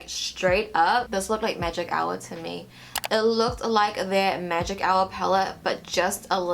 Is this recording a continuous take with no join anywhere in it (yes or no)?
yes